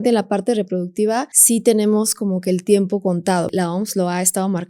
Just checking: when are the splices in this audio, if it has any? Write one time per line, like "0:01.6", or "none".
0:01.3
0:03.5